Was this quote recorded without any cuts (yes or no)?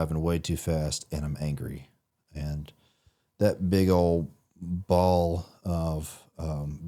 yes